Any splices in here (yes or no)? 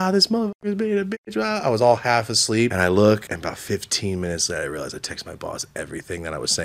yes